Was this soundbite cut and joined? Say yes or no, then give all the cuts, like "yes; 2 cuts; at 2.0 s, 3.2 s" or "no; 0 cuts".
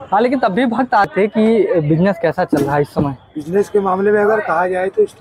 yes; 1 cut; at 1.1 s